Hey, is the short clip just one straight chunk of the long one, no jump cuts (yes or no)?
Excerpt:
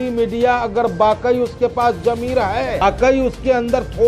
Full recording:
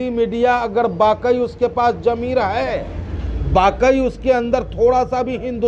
no